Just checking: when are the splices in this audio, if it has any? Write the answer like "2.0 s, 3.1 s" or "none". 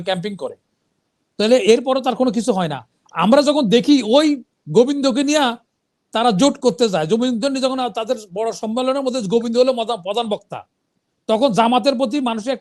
none